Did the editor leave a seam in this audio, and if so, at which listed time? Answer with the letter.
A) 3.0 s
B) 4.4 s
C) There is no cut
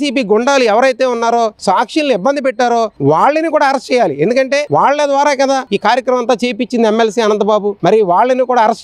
C